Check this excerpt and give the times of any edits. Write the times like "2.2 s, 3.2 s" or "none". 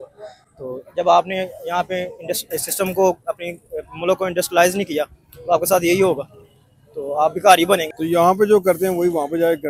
8.0 s